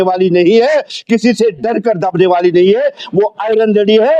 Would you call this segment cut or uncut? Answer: uncut